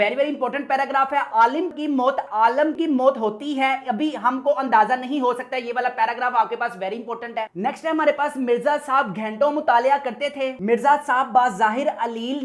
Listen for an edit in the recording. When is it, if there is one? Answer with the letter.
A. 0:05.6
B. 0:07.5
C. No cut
B